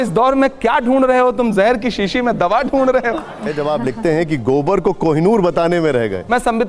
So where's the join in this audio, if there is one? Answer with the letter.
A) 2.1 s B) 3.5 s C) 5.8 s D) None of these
B